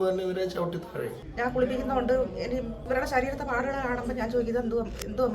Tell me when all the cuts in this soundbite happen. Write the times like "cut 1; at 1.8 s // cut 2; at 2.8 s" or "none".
cut 1; at 1.2 s // cut 2; at 2.8 s